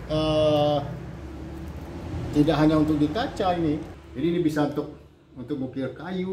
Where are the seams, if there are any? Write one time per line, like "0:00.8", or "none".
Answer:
0:04.0